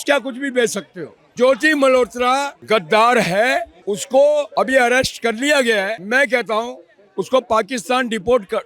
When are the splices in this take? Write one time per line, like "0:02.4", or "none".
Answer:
0:02.6
0:03.7
0:04.5
0:06.0